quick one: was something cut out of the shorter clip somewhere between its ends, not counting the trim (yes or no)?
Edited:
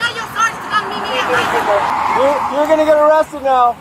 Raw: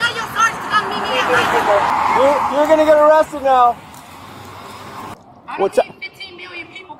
no